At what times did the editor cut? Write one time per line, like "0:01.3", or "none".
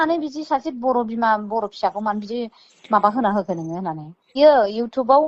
0:04.3